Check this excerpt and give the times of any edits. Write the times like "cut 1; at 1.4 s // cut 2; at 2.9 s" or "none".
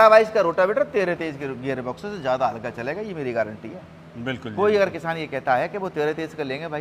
none